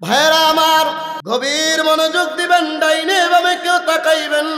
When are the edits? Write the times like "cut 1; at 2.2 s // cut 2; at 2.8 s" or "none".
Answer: cut 1; at 1.2 s